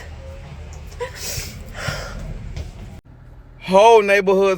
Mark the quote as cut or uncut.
cut